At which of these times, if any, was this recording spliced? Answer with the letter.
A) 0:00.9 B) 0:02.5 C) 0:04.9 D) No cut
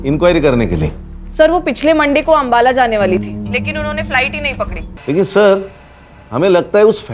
C